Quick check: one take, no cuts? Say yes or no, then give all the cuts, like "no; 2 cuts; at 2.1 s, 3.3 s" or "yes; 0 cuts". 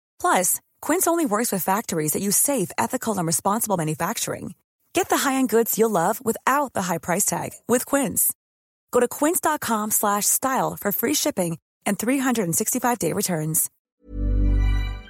no; 1 cut; at 13.7 s